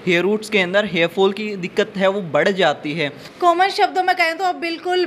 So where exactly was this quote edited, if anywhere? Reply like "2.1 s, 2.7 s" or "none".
3.2 s